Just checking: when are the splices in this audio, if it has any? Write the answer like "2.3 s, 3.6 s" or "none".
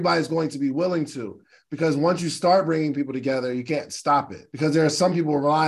4.4 s